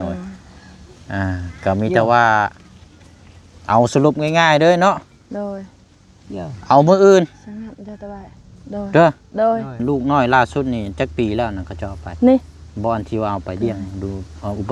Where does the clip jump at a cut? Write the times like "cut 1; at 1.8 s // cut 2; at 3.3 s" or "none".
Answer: cut 1; at 9.8 s